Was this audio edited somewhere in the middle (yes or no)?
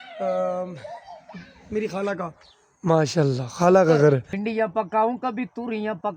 yes